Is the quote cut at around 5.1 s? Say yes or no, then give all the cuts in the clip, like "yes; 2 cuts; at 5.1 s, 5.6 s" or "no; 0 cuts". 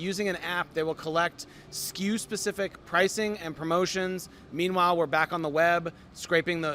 no; 0 cuts